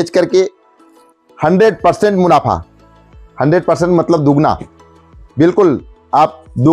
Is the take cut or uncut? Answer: uncut